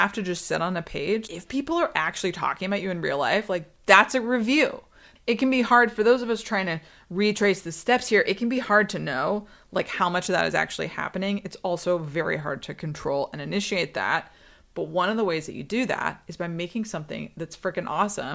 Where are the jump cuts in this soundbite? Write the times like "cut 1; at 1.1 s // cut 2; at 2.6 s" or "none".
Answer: cut 1; at 1.2 s // cut 2; at 5.0 s